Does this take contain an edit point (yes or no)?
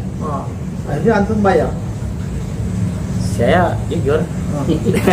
no